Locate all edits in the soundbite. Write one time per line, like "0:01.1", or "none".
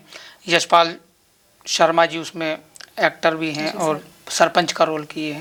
none